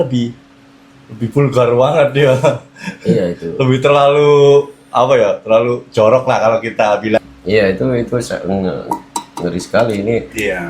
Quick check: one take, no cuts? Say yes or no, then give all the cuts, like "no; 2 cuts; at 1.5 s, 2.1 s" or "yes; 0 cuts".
no; 1 cut; at 7.2 s